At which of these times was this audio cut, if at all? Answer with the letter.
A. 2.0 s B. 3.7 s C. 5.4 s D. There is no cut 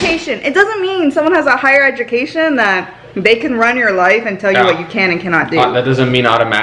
D